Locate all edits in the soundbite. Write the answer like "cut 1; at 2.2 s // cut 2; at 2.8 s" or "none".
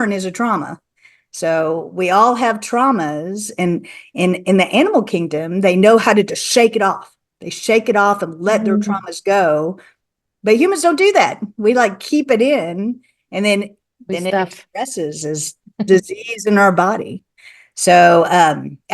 none

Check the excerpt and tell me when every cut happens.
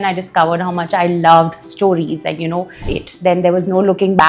cut 1; at 2.8 s

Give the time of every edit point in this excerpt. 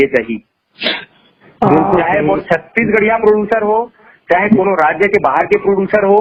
none

